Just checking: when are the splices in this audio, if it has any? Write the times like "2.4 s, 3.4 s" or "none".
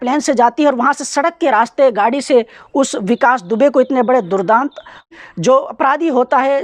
5.1 s